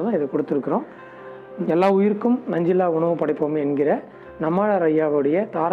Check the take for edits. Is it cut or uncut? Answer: uncut